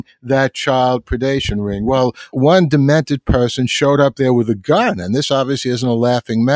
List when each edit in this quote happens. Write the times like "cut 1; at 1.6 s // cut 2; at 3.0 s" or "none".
cut 1; at 2.3 s